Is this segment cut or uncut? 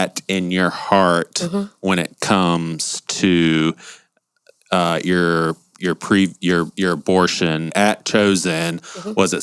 cut